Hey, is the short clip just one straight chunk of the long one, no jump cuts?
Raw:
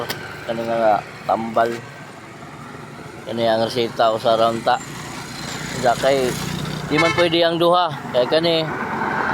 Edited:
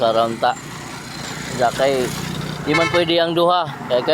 yes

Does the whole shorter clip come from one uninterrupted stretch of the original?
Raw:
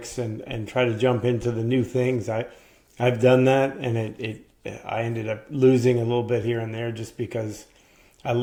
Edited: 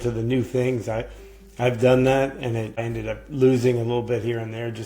no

